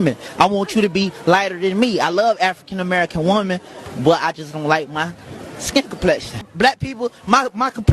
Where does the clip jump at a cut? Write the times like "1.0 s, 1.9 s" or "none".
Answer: 6.5 s